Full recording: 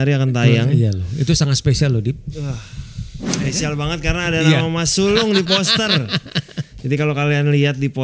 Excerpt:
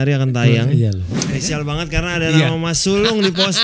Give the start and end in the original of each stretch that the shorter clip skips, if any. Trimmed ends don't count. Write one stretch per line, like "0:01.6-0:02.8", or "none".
0:01.0-0:03.1